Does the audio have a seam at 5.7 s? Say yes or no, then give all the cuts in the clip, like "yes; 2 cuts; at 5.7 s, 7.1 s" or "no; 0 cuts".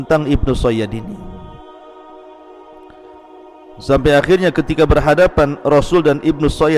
no; 2 cuts; at 1.4 s, 3.9 s